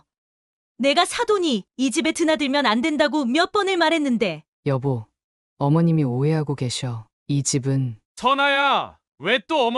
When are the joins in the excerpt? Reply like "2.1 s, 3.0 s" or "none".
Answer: 4.5 s, 8.0 s